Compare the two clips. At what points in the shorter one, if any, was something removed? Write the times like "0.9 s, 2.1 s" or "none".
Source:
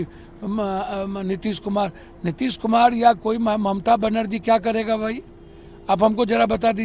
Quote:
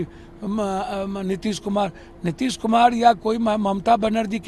none